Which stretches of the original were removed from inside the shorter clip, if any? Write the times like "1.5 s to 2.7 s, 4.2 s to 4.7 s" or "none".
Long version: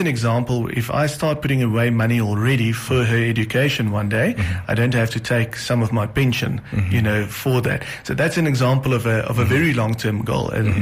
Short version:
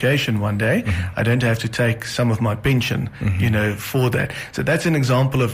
none